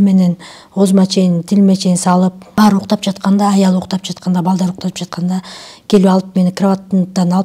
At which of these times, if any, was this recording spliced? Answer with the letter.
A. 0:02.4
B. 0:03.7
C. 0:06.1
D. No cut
A